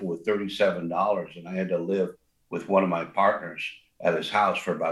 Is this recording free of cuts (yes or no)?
yes